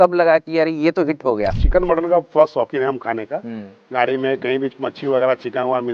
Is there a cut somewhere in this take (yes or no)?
yes